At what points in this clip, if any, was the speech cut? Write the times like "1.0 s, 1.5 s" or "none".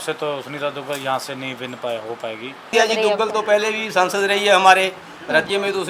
2.7 s